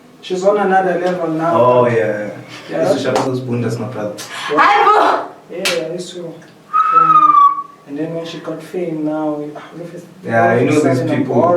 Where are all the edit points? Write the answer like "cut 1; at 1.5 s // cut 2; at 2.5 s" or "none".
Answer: cut 1; at 3.0 s